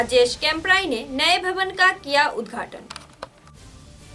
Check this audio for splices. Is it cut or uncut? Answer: uncut